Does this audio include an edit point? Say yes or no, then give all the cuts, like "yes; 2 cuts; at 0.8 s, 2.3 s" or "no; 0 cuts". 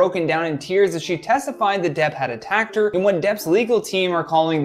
no; 0 cuts